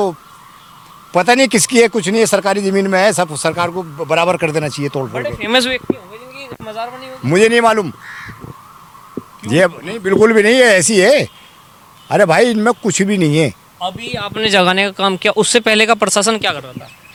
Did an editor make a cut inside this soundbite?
no; 0 cuts

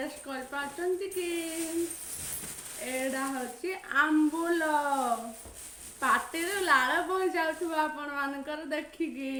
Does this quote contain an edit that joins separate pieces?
no; 0 cuts

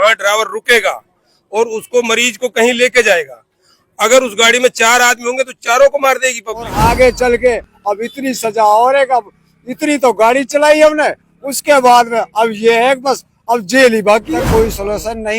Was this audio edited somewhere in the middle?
yes; 2 cuts; at 6.7 s, 14.3 s

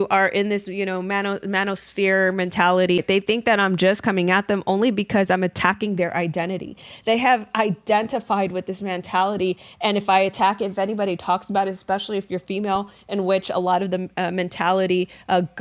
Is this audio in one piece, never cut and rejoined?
no; 1 cut; at 3.0 s

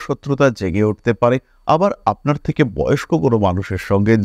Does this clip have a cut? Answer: no; 0 cuts

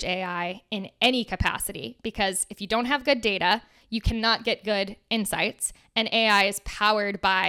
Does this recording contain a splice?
no; 0 cuts

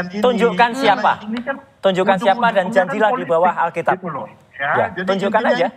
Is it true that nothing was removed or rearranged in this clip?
yes; 0 cuts

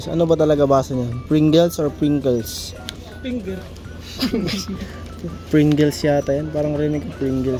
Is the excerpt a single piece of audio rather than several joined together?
yes; 0 cuts

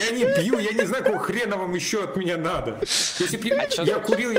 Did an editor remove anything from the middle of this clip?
no; 0 cuts

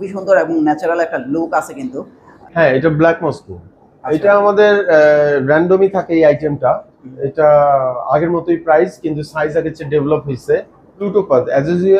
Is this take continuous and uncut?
no; 2 cuts; at 2.2 s, 11.1 s

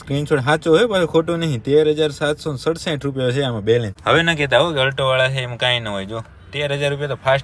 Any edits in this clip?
no; 0 cuts

